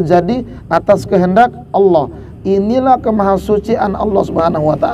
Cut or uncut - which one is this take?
uncut